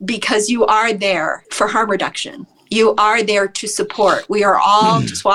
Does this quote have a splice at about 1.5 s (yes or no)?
yes